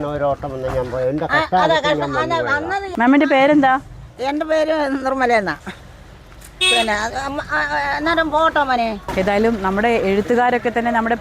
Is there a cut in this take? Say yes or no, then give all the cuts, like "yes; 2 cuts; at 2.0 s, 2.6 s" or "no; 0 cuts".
yes; 2 cuts; at 2.8 s, 9.1 s